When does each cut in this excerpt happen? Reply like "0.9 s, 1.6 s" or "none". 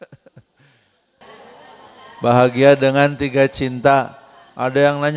1.2 s